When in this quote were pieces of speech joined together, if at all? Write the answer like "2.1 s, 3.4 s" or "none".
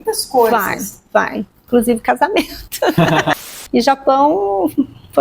3.4 s